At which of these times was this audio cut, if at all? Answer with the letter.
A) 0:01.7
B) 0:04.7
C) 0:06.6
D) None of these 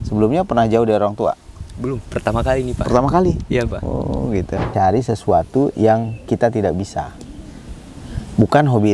B